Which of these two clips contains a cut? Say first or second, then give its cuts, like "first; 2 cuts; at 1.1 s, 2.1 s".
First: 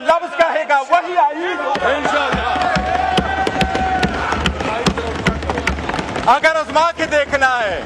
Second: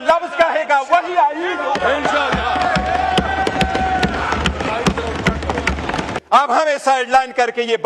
second; 1 cut; at 6.1 s